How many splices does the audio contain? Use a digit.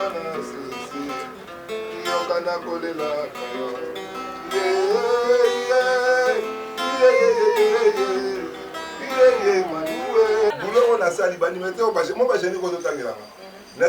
1